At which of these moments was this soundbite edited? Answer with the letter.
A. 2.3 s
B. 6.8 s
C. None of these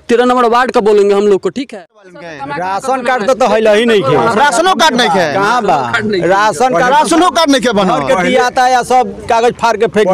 A